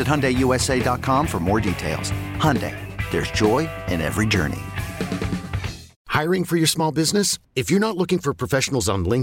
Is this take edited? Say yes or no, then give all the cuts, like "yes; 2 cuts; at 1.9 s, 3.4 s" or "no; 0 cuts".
yes; 1 cut; at 5.9 s